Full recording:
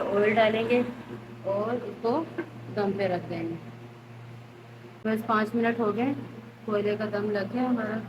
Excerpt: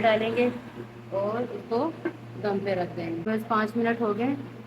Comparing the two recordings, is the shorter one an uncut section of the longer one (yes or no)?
no